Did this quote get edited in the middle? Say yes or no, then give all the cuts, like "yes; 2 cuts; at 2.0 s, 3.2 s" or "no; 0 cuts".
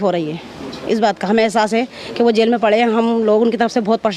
no; 0 cuts